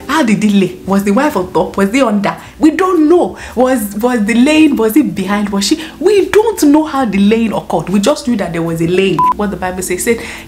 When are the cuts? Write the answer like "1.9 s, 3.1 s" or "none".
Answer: 9.3 s